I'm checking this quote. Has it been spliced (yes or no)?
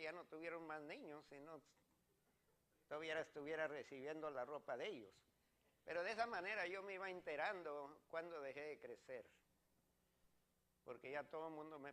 yes